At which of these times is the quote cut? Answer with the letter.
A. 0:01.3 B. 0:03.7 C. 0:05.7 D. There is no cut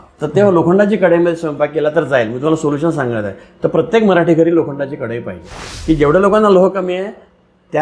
C